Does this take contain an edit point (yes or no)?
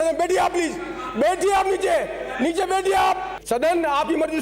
yes